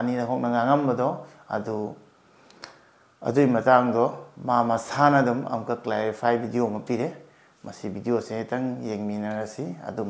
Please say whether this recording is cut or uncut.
uncut